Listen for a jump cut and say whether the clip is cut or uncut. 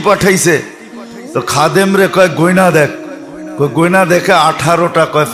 uncut